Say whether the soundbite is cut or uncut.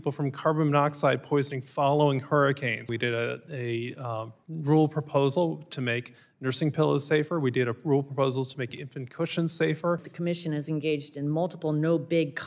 cut